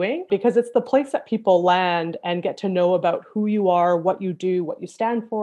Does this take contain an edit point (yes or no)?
no